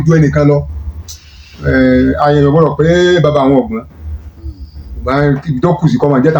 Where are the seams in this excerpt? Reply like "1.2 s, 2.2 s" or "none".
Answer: none